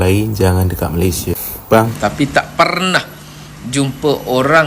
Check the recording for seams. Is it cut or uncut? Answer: cut